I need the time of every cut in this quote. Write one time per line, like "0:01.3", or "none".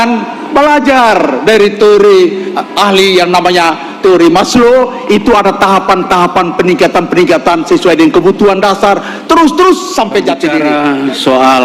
0:10.6